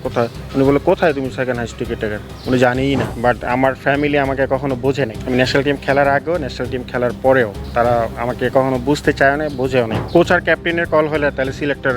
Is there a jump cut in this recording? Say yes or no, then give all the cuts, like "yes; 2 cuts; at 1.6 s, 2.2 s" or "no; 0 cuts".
yes; 4 cuts; at 3.1 s, 5.2 s, 7.6 s, 10.0 s